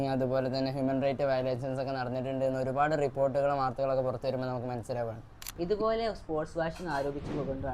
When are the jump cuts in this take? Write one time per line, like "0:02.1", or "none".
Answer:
0:05.4